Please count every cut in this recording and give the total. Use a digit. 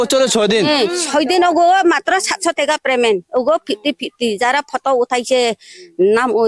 0